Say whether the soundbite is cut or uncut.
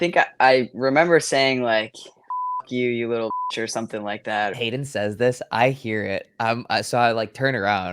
cut